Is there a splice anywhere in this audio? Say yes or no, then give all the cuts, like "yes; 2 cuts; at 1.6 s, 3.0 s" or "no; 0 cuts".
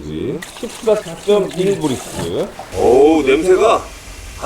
yes; 1 cut; at 2.6 s